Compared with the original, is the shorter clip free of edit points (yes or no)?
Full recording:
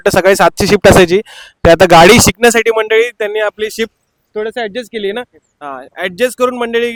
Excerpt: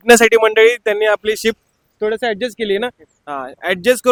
yes